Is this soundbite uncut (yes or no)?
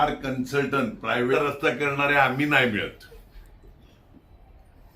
no